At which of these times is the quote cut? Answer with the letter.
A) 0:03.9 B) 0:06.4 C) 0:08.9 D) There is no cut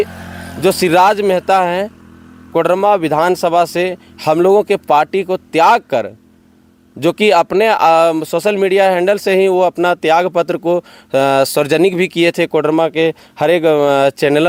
D